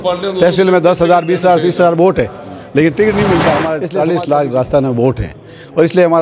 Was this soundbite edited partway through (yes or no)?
yes